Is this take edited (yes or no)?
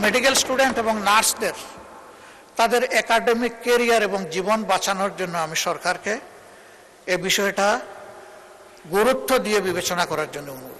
no